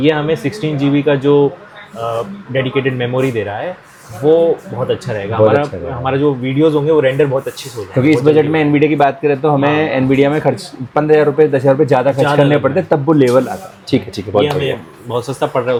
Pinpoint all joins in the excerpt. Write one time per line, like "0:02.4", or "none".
none